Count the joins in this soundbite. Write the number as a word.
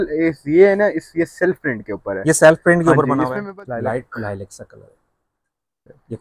one